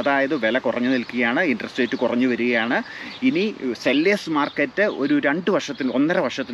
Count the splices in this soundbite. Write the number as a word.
zero